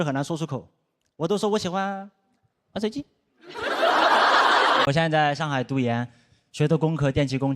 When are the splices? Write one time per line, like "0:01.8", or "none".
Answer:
0:04.9

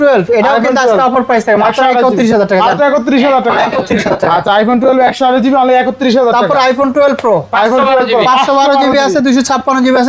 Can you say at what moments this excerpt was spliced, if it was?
none

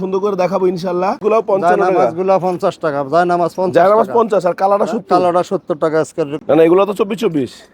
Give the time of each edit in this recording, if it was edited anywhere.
0:01.2
0:06.3

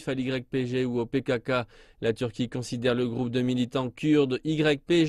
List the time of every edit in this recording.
0:03.0

